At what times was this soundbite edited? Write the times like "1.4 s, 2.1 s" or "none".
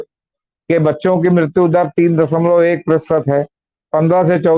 none